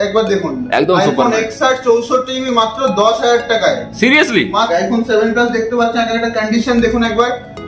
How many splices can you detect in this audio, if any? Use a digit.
1